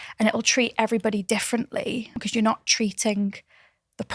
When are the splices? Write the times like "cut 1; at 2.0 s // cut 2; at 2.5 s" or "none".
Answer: cut 1; at 2.2 s